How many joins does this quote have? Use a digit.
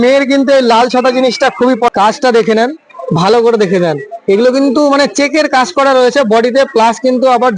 1